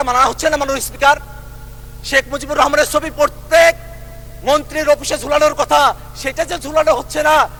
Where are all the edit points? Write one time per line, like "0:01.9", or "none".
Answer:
none

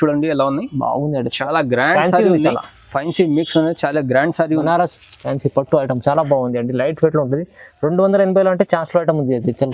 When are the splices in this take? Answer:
0:04.6

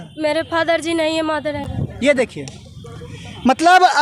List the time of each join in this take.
none

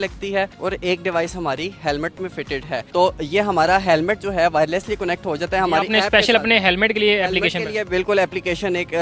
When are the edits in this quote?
none

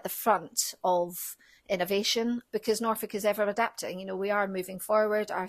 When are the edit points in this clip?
0:02.4

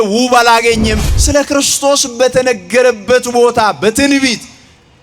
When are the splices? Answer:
0:01.0

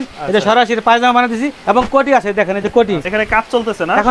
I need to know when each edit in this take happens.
0:01.6
0:03.1

